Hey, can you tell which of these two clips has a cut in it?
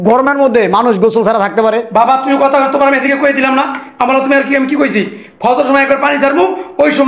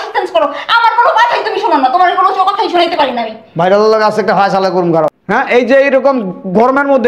second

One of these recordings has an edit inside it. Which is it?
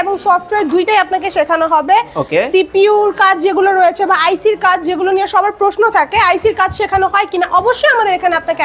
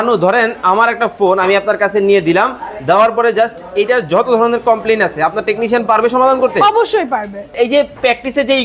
second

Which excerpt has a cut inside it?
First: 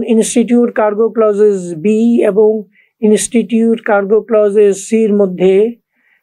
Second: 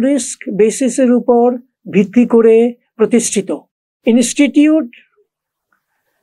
second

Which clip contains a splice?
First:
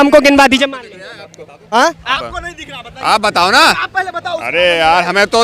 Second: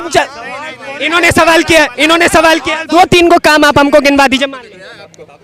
second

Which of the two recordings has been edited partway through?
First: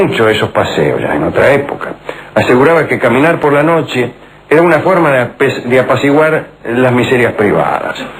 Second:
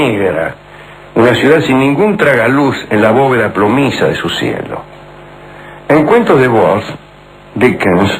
second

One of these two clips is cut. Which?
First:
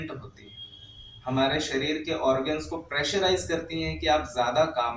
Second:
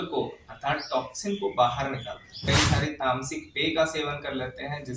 second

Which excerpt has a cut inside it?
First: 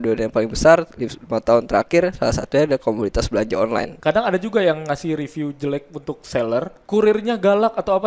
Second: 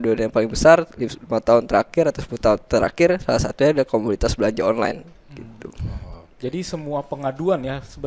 first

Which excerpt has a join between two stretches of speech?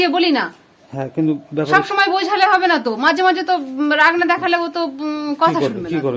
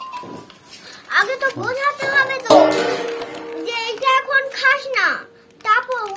second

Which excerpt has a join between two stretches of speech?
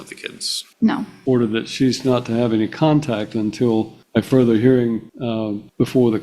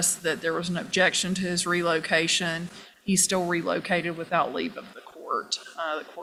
first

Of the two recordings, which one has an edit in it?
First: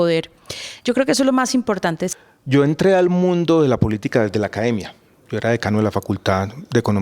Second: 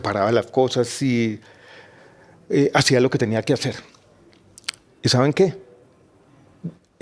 first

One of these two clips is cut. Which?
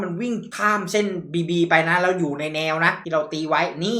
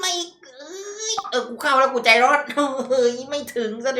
first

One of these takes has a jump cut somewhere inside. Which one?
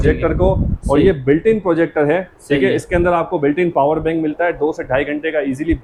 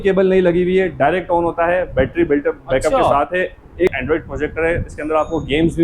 second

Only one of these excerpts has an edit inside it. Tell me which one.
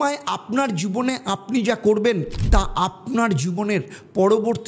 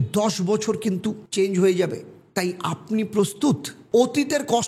second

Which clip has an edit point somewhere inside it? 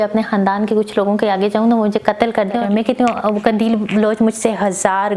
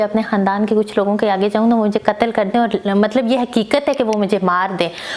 first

